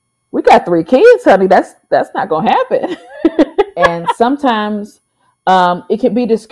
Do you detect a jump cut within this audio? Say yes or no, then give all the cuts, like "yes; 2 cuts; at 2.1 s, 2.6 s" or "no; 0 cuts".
yes; 1 cut; at 4.0 s